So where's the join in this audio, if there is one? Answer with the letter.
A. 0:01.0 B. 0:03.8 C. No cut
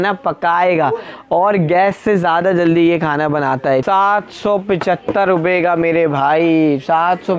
B